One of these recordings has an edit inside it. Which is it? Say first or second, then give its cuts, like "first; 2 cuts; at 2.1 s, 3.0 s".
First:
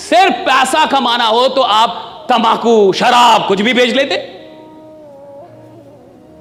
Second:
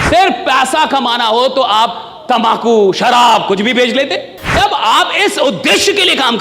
second; 1 cut; at 4.5 s